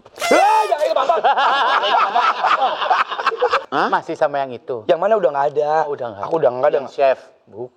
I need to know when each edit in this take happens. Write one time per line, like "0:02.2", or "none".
0:03.6